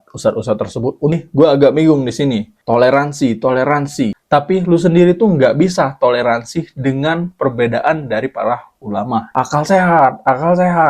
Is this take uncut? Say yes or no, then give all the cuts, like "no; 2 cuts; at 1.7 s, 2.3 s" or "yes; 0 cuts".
no; 3 cuts; at 1.1 s, 2.5 s, 9.3 s